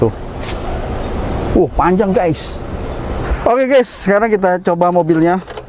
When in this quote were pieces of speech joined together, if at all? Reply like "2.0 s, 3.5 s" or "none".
3.2 s

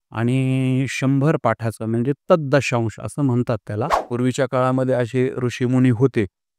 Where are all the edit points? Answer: 4.0 s

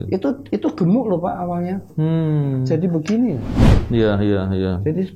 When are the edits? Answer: none

